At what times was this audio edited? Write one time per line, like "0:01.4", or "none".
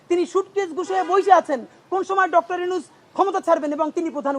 none